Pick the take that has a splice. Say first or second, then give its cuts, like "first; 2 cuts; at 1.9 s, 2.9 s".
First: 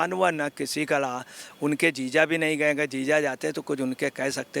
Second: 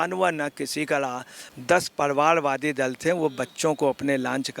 second; 1 cut; at 1.4 s